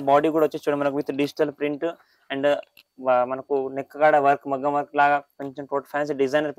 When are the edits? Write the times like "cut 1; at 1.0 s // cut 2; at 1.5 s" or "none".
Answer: none